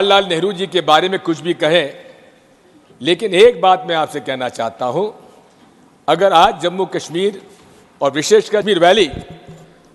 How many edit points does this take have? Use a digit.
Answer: 1